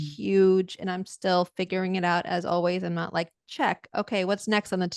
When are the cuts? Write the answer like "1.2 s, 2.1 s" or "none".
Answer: none